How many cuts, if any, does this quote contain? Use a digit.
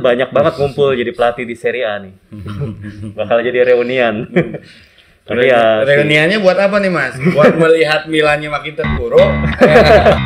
0